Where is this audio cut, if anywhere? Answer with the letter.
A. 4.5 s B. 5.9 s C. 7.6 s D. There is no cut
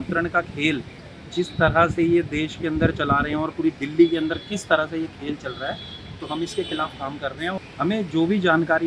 C